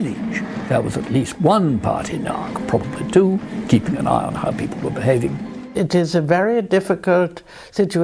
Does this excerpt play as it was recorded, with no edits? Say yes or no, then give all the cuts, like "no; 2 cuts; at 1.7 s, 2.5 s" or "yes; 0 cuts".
yes; 0 cuts